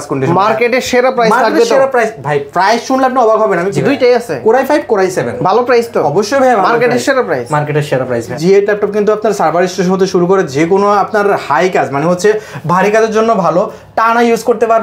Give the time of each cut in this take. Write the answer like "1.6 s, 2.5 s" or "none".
3.7 s, 8.3 s

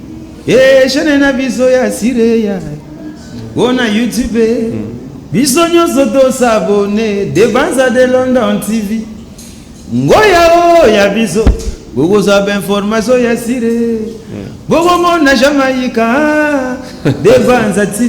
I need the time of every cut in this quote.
8.5 s

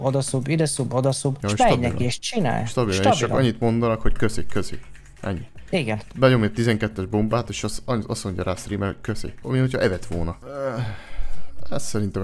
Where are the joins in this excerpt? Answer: 1.4 s, 9.4 s, 10.4 s

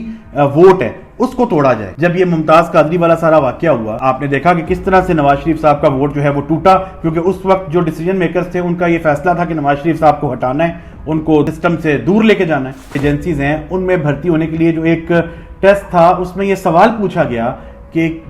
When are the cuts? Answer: 1.9 s, 3.9 s, 11.5 s, 13.0 s

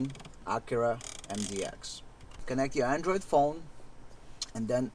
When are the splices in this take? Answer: 2.3 s

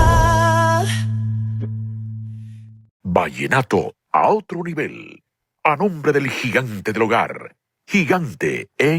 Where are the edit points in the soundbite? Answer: 3.0 s

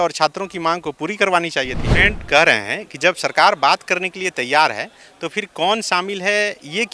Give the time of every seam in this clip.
1.8 s

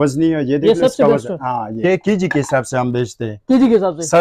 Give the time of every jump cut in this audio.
1.8 s

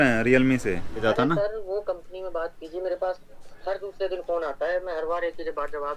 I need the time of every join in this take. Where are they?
1.0 s

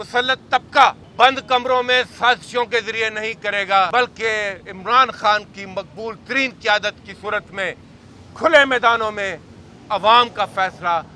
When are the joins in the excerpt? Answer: 1.0 s, 3.9 s

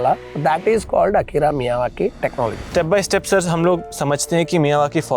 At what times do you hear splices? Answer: 2.7 s, 3.9 s

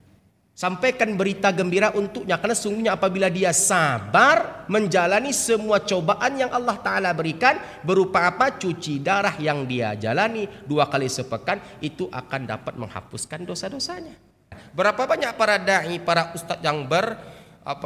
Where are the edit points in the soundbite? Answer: 14.6 s

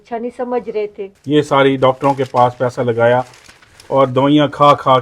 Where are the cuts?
1.1 s

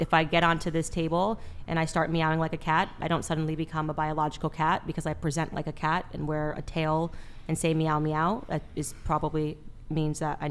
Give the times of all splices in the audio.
none

